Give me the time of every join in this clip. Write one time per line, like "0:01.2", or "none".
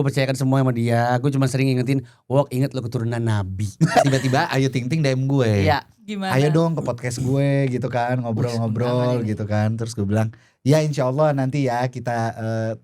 0:04.0